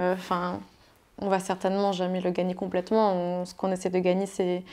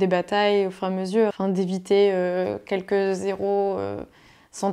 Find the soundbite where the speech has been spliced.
second; 1 cut; at 1.4 s

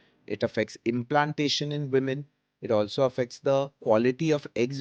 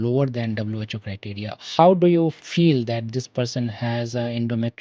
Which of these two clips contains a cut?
second; 2 cuts; at 1.6 s, 2.4 s

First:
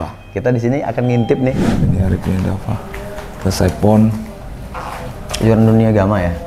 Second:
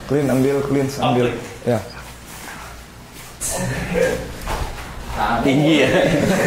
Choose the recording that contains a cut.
first; 1 cut; at 1.7 s

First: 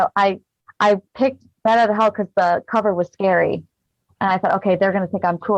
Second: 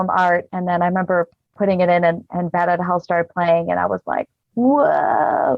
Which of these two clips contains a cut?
second; 1 cut; at 1.6 s

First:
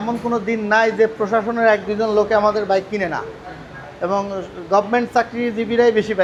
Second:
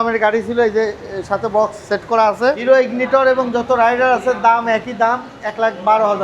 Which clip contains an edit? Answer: second; 1 cut; at 2.6 s

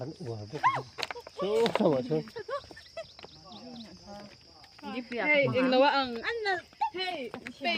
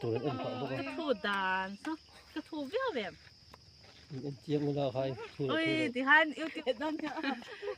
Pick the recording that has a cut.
second; 1 cut; at 6.6 s

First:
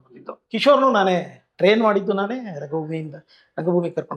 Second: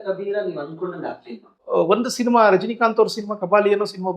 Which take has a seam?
second; 1 cut; at 1.6 s

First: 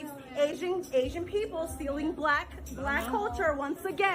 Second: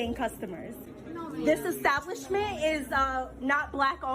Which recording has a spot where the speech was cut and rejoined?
second; 1 cut; at 0.9 s

